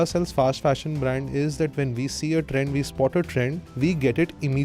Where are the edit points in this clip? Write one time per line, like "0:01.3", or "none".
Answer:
0:03.6

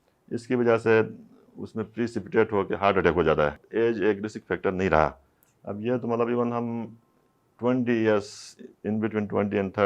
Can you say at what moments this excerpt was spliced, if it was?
0:03.6

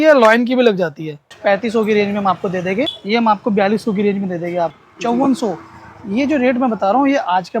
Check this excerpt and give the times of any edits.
0:01.3
0:03.0
0:04.8

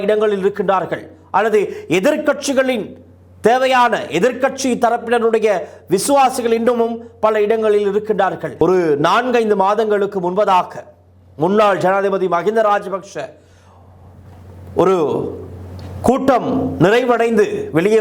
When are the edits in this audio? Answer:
0:08.5

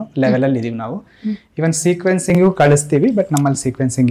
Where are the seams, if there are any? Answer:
none

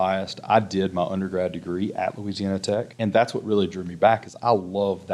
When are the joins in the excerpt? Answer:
0:02.9

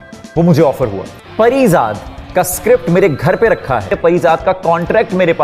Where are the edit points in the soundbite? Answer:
0:04.0

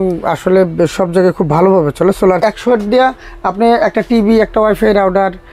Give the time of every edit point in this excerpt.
0:02.5

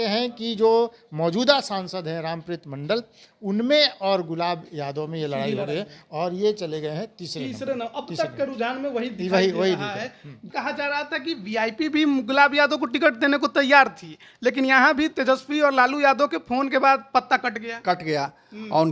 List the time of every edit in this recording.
0:10.4

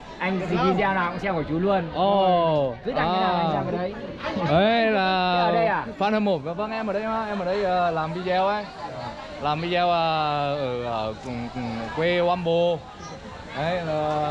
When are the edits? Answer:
none

